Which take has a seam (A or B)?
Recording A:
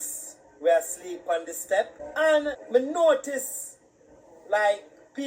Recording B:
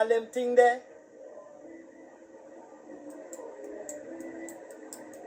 A